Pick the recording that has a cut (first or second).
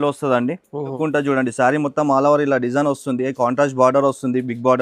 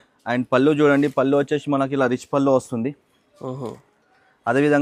first